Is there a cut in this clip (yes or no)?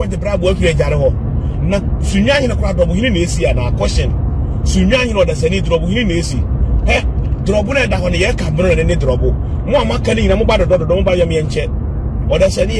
no